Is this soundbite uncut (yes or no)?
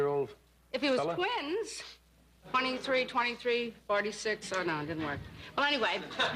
yes